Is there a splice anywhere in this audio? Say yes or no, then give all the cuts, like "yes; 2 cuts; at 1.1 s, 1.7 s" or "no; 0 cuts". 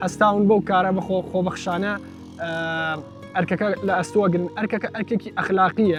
no; 0 cuts